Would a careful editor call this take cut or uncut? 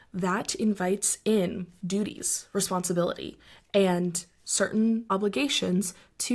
cut